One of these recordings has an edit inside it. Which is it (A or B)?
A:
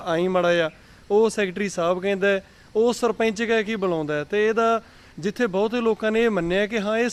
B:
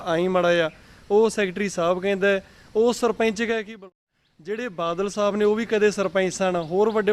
B